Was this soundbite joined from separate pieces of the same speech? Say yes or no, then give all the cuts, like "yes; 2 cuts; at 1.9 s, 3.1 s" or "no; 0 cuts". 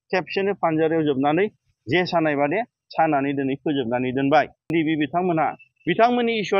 yes; 1 cut; at 4.7 s